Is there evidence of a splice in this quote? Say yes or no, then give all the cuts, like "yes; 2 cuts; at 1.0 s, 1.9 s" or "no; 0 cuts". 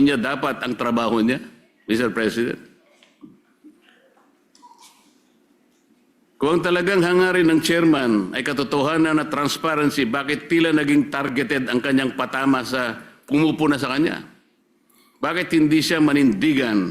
no; 0 cuts